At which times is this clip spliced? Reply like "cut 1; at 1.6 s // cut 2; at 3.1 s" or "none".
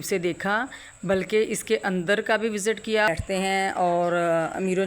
cut 1; at 3.1 s

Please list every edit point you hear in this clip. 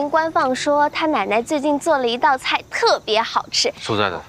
none

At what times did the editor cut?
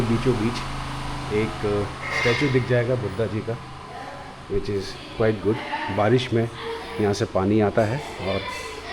none

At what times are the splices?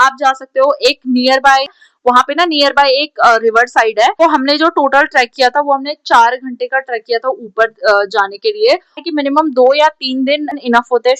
cut 1; at 1.8 s // cut 2; at 4.2 s // cut 3; at 9.0 s

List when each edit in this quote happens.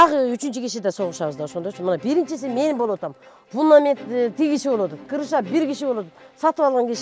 none

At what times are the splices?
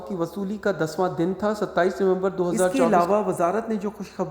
cut 1; at 2.8 s

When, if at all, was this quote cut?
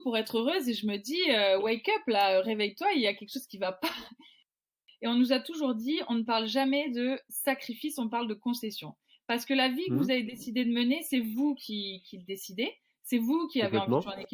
cut 1; at 4.5 s

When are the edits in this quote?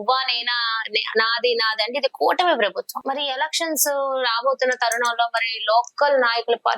cut 1; at 2.9 s

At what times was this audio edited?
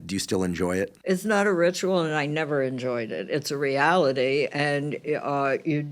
cut 1; at 1.0 s

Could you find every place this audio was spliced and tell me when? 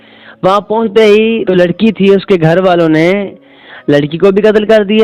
none

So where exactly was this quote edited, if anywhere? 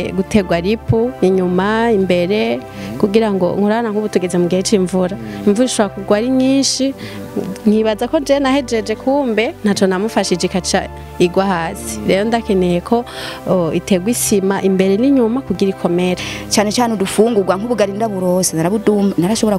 cut 1; at 16.3 s

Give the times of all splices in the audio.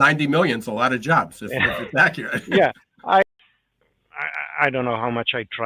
cut 1; at 3.2 s

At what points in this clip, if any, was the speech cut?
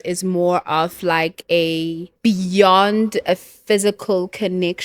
cut 1; at 2.1 s

